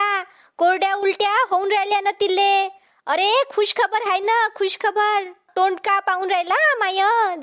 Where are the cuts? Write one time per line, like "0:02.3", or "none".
none